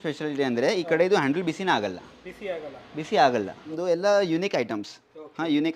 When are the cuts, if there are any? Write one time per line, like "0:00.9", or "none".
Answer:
0:03.7